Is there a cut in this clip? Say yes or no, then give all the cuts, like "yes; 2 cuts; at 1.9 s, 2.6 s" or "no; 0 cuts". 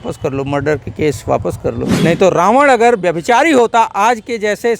yes; 1 cut; at 1.9 s